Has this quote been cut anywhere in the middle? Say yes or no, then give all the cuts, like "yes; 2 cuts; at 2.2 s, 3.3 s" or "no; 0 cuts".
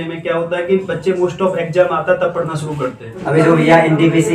yes; 1 cut; at 3.1 s